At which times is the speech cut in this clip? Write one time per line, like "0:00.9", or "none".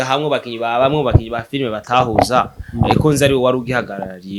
none